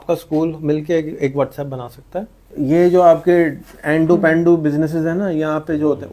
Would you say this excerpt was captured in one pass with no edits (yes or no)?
no